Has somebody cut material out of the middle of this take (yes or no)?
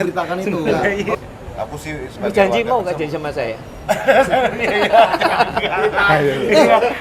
yes